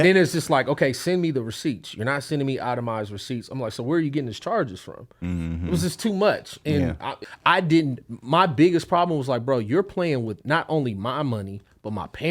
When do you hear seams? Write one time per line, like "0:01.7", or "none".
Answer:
0:07.2